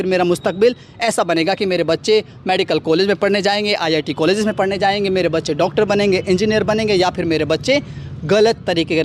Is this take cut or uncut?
uncut